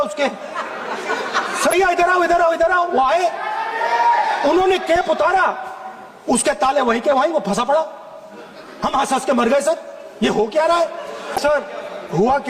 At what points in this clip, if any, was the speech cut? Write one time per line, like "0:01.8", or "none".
0:01.7
0:11.4